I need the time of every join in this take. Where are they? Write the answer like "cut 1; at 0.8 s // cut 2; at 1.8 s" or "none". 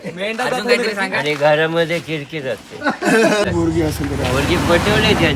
cut 1; at 3.5 s